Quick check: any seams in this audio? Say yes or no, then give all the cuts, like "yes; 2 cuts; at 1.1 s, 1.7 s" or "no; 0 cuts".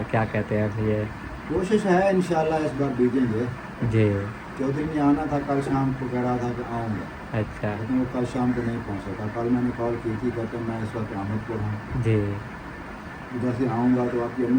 no; 0 cuts